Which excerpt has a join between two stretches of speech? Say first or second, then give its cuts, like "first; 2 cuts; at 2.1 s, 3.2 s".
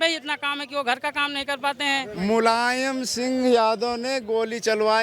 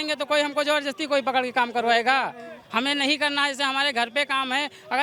first; 1 cut; at 2.1 s